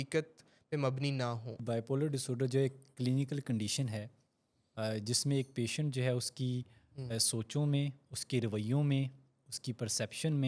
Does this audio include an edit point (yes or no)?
yes